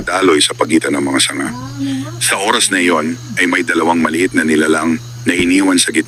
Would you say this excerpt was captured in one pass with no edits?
yes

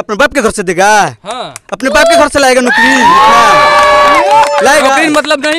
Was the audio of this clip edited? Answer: no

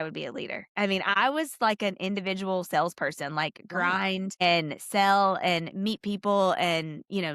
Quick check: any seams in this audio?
yes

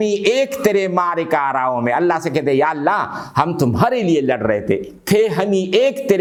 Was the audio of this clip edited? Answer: no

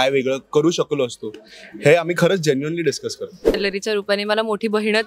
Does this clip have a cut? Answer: yes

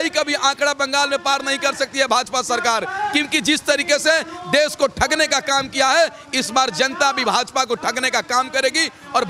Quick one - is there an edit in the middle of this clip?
no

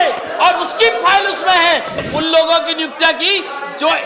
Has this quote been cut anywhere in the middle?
yes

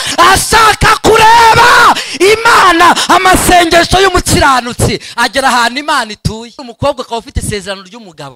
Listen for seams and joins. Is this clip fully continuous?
no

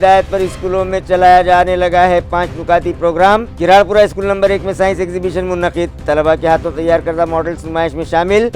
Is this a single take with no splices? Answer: yes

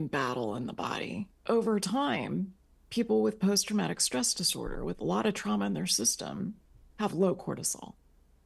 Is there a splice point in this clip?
yes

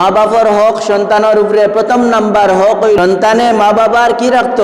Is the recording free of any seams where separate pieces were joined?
no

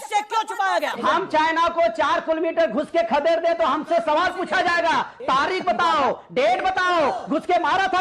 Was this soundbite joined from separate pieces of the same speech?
yes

